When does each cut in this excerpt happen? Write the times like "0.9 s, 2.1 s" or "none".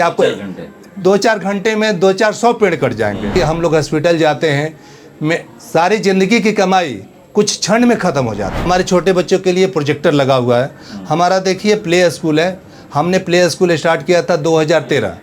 3.3 s, 8.7 s